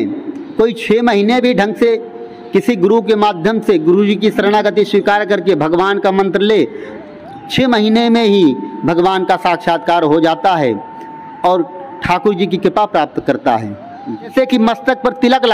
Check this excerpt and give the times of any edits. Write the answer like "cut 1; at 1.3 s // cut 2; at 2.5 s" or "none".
cut 1; at 14.3 s